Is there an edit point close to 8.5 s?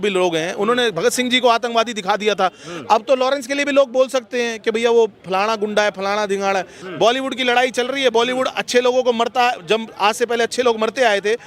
no; 1 cut; at 6.8 s

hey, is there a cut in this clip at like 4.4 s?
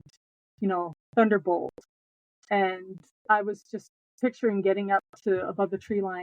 no; 1 cut; at 3.1 s

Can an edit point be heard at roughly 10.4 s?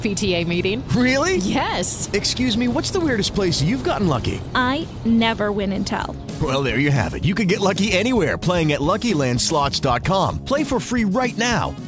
no; 0 cuts

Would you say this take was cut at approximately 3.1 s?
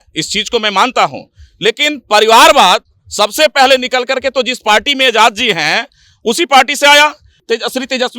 no; 1 cut; at 7.3 s

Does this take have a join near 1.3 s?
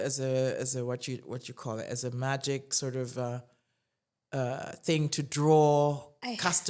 no; 0 cuts

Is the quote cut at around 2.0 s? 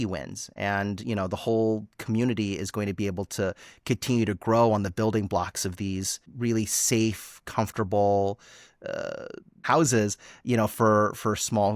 no; 2 cuts; at 6.2 s, 9.6 s

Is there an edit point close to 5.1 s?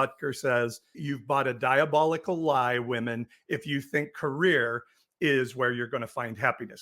no; 1 cut; at 1.1 s

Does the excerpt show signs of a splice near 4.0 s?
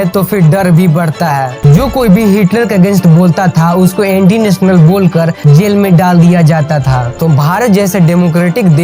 no; 2 cuts; at 1.5 s, 7.2 s

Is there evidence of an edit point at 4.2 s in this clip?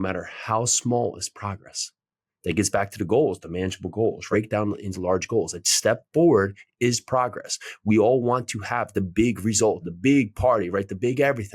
yes; 2 cuts; at 4.2 s, 9.8 s

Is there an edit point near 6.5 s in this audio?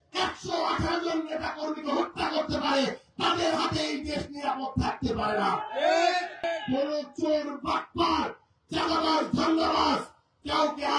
yes; 1 cut; at 6.5 s

